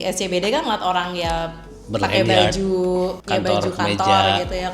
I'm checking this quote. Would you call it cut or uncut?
cut